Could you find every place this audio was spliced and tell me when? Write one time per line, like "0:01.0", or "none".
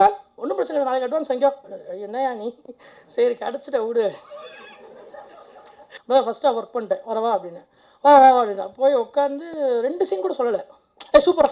0:05.9